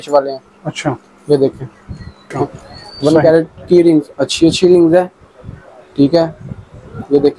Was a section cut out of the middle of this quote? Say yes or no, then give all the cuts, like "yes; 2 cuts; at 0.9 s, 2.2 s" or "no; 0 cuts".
yes; 1 cut; at 2.3 s